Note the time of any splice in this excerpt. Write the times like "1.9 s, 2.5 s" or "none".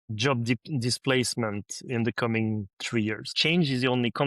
3.3 s